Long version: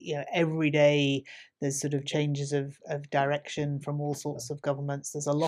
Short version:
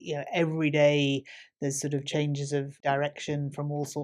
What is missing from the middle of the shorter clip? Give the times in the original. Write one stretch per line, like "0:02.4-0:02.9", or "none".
0:02.7-0:03.0